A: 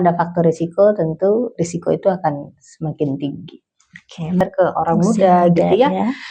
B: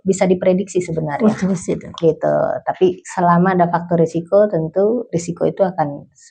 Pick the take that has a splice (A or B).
A